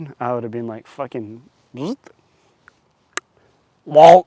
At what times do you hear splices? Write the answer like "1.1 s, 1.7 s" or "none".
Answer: none